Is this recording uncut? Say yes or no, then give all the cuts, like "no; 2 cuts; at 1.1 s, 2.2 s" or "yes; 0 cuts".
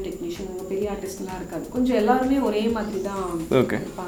yes; 0 cuts